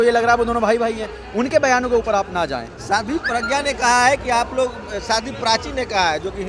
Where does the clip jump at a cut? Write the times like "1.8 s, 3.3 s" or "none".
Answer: none